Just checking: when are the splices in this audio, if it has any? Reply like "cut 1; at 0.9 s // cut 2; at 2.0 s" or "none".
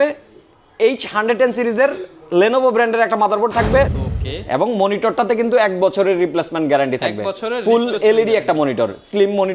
cut 1; at 4.0 s